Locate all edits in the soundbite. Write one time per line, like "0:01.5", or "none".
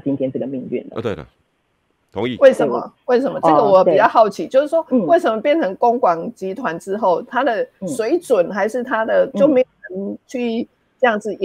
none